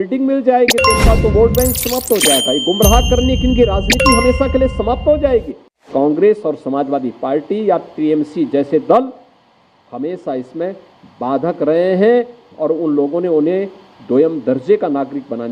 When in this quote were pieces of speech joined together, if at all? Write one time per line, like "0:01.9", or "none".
0:05.9